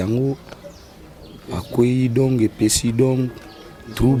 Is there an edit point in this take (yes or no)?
no